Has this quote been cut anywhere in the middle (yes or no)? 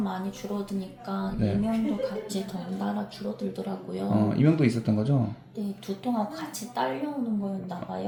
no